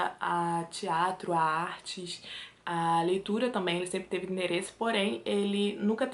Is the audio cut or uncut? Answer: uncut